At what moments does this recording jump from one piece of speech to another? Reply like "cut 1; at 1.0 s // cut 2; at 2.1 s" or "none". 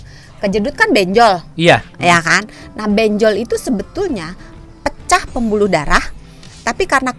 none